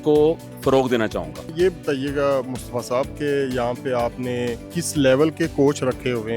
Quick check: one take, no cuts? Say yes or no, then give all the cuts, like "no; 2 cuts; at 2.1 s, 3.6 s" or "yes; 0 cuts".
no; 2 cuts; at 1.5 s, 4.7 s